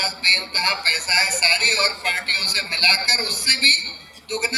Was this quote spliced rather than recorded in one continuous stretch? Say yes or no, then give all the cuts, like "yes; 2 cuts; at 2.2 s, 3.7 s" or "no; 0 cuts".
no; 0 cuts